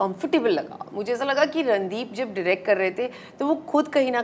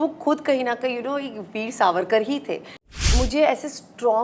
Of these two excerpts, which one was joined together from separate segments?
second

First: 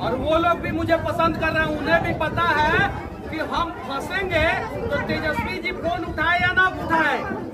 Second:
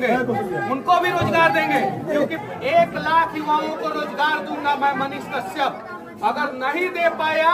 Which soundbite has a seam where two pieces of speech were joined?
second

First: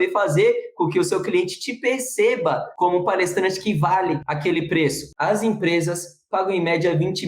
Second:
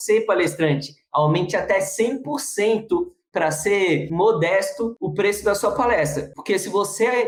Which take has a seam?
first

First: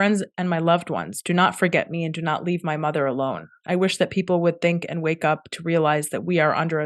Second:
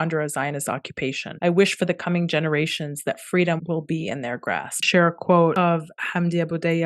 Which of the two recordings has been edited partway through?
second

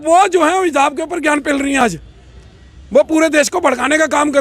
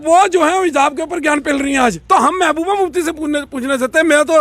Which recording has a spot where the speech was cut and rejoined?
second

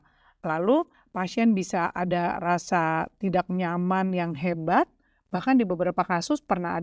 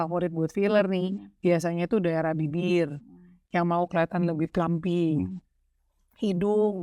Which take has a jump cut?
first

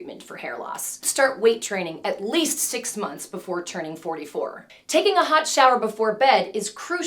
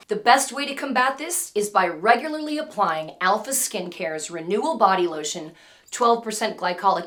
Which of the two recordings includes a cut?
first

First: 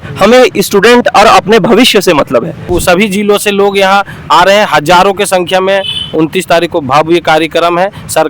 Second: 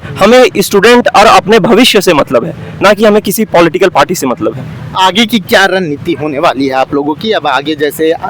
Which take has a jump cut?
first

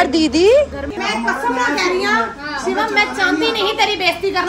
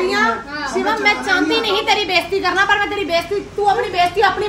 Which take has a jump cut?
first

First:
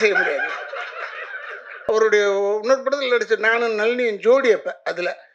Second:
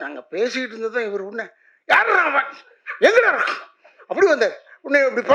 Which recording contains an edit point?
first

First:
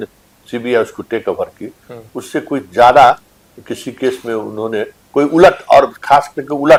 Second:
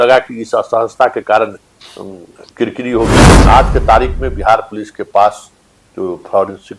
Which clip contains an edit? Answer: second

